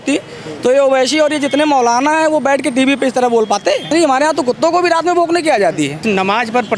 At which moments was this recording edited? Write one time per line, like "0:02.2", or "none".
0:03.9
0:06.0